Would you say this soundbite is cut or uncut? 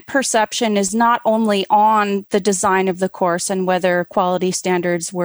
uncut